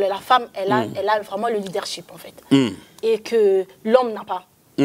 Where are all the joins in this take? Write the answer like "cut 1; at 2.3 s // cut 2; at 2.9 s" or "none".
none

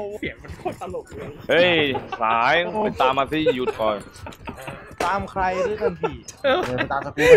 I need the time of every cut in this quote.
none

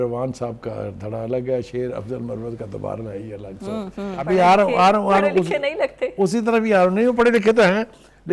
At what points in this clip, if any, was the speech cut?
cut 1; at 4.2 s

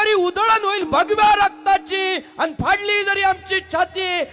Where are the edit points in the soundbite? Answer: none

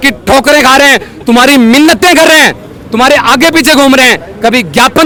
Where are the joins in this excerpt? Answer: none

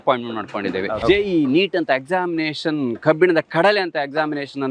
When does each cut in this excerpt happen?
cut 1; at 0.9 s

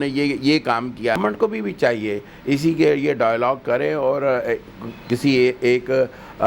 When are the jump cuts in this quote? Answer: cut 1; at 1.2 s

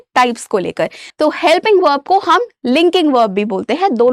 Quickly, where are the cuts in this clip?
cut 1; at 1.0 s

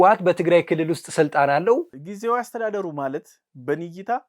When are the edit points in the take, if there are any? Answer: cut 1; at 1.9 s

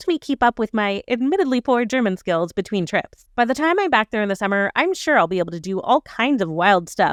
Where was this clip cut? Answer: none

